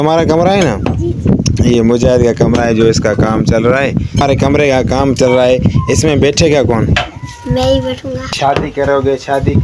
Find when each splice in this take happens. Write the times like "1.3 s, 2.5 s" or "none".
4.2 s, 8.3 s